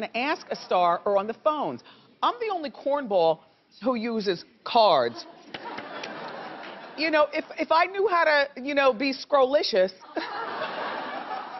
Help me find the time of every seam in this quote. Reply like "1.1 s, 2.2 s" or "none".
10.3 s